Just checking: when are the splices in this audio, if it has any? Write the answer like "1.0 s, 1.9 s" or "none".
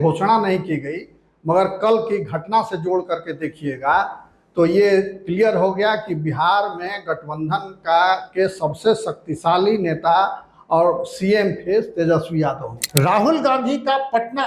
12.7 s